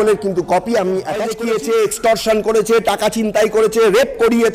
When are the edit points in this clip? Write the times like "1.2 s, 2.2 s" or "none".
1.3 s